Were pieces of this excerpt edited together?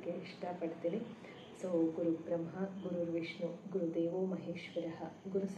no; 0 cuts

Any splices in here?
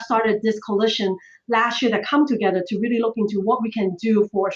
no; 0 cuts

